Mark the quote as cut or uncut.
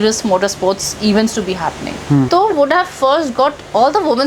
cut